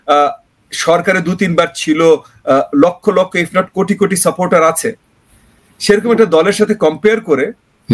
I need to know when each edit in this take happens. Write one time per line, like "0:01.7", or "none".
none